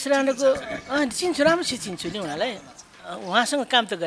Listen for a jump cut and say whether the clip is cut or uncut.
uncut